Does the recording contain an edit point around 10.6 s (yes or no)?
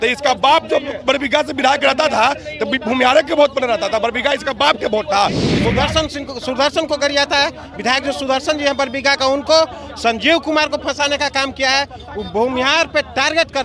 no